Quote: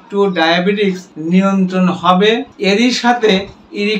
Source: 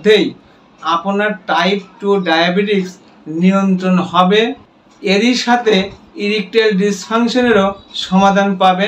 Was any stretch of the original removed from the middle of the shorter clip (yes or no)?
yes